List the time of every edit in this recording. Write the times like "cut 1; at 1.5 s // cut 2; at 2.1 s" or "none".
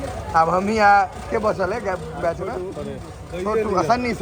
none